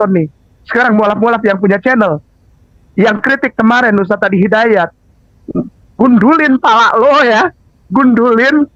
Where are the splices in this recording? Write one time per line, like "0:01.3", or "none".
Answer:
none